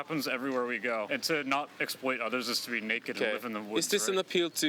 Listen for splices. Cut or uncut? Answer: cut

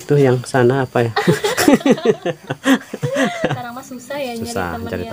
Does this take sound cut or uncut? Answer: cut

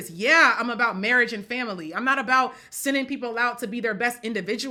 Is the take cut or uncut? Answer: uncut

